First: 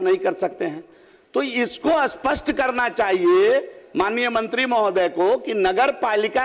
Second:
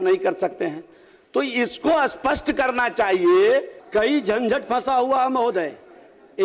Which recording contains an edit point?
second; 1 cut; at 3.8 s

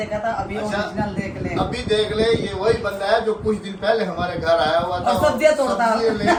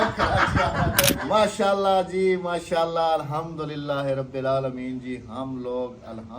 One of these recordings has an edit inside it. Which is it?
second; 1 cut; at 1.2 s

